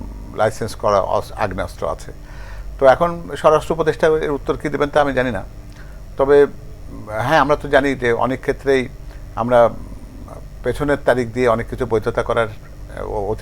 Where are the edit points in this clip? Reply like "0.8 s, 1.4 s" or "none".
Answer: none